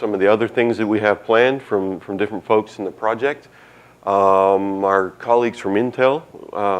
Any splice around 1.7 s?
no; 1 cut; at 5.0 s

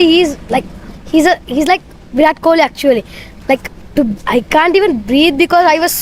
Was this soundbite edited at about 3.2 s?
yes; 1 cut; at 3.2 s

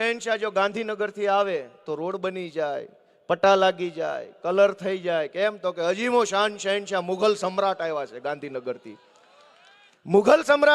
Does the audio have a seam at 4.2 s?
no; 0 cuts

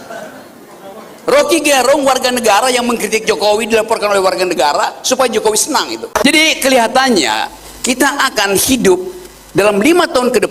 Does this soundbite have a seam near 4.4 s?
no; 1 cut; at 6.0 s

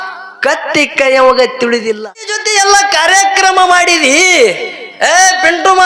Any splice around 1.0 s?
no; 1 cut; at 2.3 s

